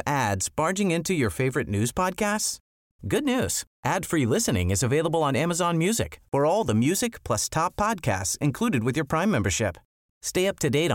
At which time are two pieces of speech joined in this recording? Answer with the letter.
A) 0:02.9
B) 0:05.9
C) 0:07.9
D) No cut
D